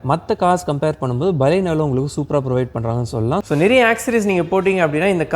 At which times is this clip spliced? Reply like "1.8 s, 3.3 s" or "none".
3.4 s